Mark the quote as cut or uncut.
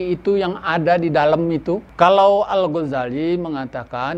cut